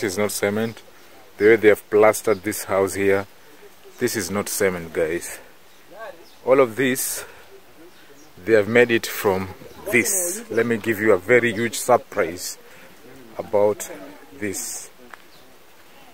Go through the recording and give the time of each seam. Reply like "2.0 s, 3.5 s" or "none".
none